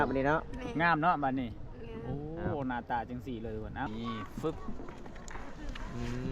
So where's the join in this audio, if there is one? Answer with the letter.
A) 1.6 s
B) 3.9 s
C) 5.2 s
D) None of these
B